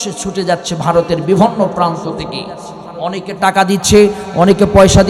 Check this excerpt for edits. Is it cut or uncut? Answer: uncut